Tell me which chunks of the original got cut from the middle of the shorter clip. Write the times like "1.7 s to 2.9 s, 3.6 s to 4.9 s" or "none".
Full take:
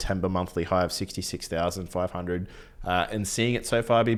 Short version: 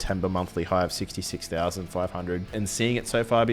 2.5 s to 3.1 s